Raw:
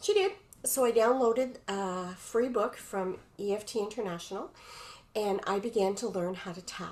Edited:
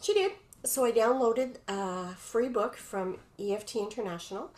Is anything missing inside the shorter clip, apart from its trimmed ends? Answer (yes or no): no